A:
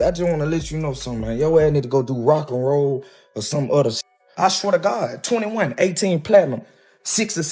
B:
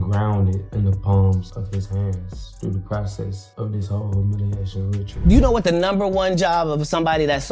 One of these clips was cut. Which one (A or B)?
B